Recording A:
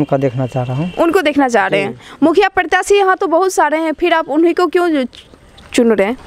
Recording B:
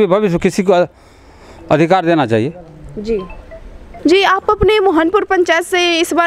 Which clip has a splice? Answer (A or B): B